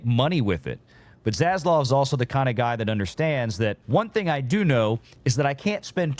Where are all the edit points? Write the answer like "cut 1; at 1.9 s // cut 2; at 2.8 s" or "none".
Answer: cut 1; at 3.8 s